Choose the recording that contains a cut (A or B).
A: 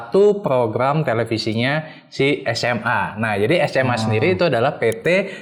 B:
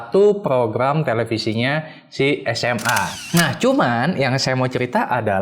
B